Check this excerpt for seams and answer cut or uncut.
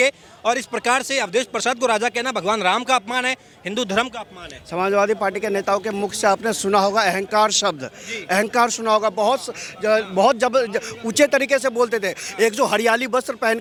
uncut